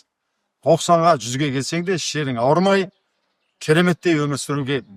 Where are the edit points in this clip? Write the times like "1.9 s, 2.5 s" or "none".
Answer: none